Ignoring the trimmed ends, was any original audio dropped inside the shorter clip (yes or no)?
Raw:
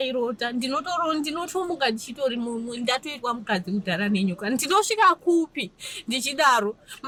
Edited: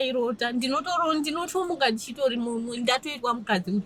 no